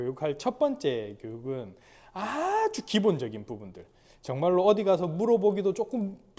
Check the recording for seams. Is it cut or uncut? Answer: uncut